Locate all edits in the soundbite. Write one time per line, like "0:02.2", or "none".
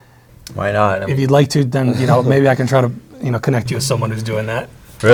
none